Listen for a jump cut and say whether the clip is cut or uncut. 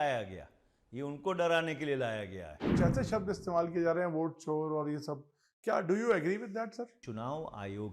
cut